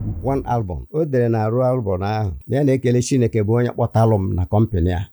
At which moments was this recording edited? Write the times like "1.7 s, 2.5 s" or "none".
none